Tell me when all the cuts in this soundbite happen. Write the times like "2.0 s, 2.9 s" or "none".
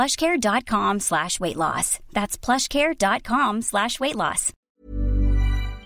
4.6 s